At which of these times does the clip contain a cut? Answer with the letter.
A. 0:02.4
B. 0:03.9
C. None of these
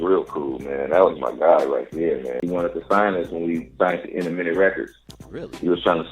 A